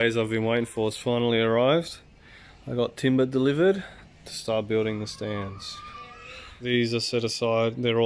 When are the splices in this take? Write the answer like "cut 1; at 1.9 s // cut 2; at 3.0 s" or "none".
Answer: none